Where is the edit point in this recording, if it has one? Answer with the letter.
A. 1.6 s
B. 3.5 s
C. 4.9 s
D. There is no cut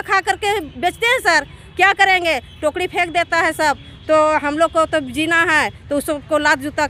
D